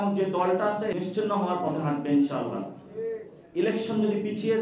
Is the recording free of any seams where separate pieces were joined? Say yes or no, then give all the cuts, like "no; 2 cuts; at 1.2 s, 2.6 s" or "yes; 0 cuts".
no; 2 cuts; at 0.9 s, 3.4 s